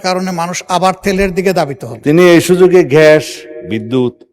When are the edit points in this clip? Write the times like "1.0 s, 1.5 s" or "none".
1.9 s